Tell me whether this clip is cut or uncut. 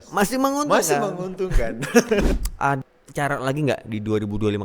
cut